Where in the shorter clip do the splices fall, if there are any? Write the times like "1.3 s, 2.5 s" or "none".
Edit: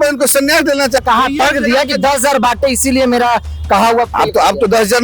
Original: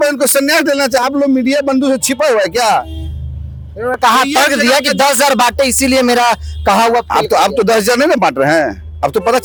1.0 s